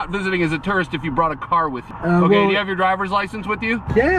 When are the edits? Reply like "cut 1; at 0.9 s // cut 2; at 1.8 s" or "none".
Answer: cut 1; at 1.9 s